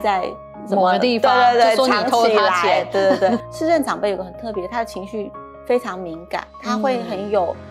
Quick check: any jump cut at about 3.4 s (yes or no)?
yes